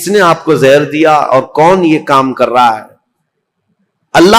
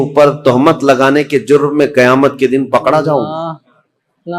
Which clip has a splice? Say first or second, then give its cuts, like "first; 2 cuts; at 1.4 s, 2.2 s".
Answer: second; 1 cut; at 3.3 s